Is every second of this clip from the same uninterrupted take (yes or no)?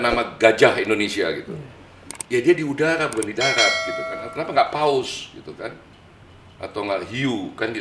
yes